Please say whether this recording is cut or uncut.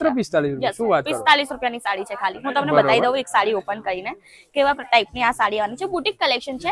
uncut